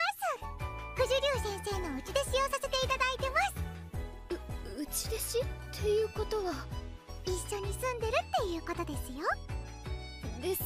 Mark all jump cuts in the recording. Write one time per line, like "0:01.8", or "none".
0:03.2